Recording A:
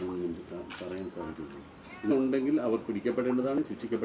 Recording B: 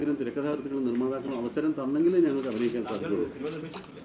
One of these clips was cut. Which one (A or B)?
A